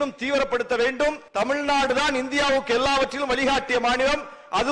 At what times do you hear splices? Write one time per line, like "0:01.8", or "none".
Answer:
0:01.2

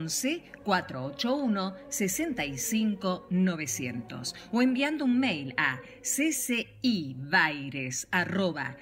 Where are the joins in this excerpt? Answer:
none

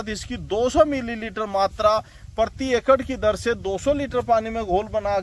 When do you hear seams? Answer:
none

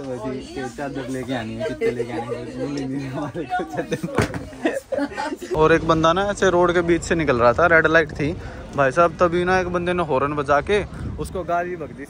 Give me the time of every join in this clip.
0:05.5

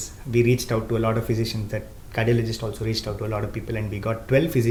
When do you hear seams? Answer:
none

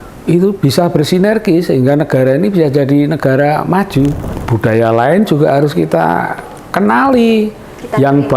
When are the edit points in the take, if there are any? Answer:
0:04.3

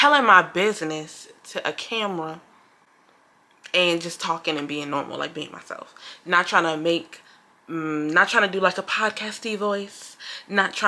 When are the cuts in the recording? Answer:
none

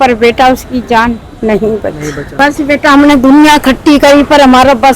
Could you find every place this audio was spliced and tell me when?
0:02.2

